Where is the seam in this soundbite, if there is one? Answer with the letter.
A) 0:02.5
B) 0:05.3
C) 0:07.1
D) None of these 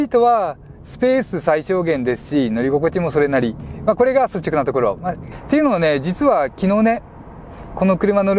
B